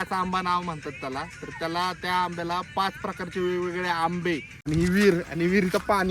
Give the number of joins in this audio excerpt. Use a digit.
1